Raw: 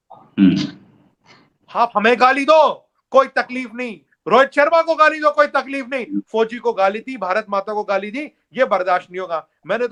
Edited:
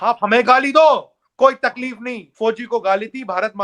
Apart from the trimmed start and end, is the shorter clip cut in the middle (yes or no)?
yes